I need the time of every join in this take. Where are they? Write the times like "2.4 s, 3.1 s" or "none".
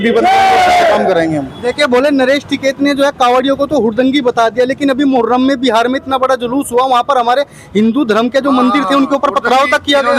none